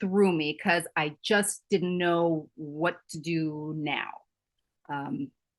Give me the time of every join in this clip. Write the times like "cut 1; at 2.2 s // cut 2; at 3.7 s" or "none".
none